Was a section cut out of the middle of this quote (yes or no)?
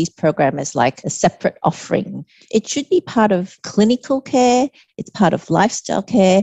yes